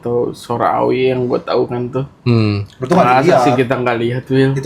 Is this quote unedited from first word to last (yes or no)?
yes